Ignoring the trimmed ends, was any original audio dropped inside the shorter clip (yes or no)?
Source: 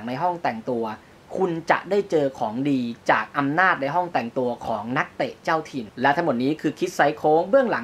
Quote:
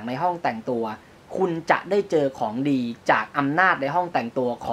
no